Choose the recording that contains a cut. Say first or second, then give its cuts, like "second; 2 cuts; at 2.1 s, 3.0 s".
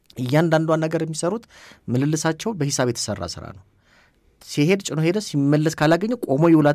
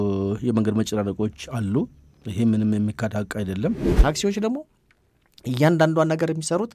second; 1 cut; at 3.9 s